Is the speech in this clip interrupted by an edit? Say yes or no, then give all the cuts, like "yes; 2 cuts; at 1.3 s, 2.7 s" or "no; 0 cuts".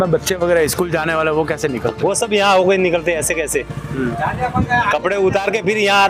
no; 0 cuts